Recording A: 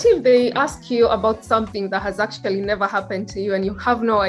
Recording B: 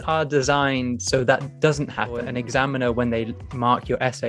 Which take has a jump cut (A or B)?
B